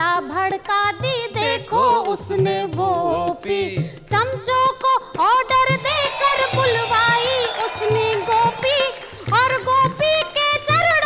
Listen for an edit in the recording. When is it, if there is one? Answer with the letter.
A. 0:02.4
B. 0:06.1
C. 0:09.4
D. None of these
B